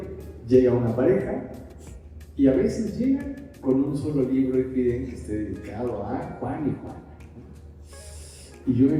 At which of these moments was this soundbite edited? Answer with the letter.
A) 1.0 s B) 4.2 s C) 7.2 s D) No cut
D